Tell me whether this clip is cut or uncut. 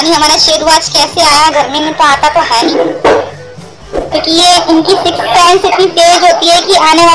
cut